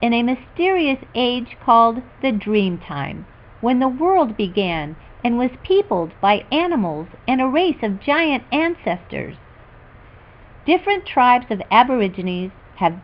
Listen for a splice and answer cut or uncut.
uncut